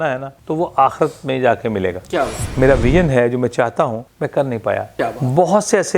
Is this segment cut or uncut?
cut